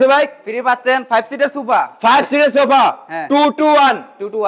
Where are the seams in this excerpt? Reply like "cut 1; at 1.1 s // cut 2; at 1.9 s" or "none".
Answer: none